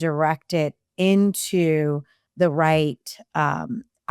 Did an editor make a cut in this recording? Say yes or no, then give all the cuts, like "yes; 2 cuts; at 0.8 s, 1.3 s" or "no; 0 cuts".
no; 0 cuts